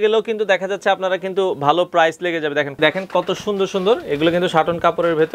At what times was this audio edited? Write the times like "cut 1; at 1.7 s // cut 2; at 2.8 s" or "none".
cut 1; at 2.8 s